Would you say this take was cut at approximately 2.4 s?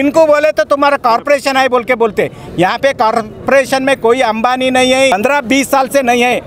no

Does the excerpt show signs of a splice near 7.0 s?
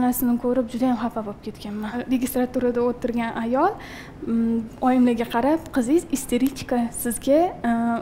no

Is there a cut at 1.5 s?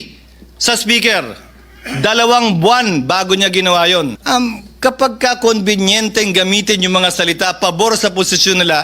no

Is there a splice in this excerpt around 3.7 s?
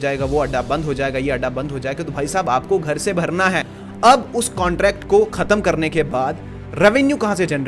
yes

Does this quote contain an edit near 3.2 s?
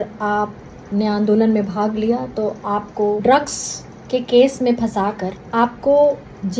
yes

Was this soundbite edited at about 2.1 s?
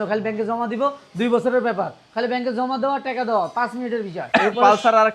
no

